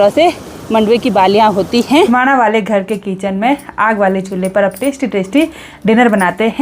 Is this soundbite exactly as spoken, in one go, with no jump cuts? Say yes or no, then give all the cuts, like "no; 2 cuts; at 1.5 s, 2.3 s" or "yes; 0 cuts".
no; 1 cut; at 2.1 s